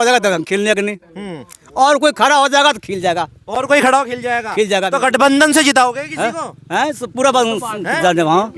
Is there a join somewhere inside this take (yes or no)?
no